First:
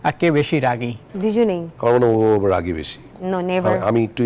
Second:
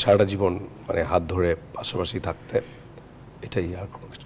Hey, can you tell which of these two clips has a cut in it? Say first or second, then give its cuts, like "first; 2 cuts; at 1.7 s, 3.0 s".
first; 1 cut; at 1.7 s